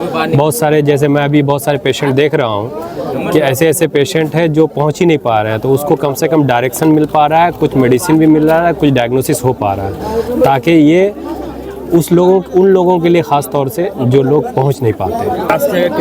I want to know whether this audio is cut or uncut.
uncut